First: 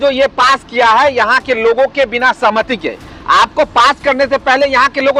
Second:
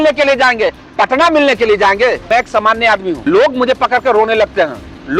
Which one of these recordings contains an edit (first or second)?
second